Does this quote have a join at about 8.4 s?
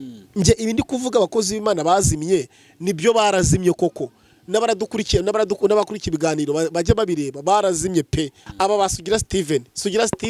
yes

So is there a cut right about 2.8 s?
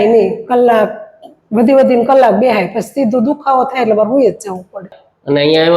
no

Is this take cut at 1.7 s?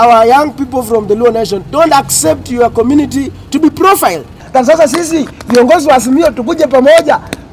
no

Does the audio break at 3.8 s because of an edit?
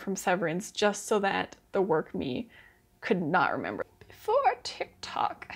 yes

